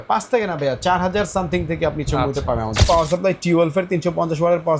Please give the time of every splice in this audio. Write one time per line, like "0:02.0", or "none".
0:02.8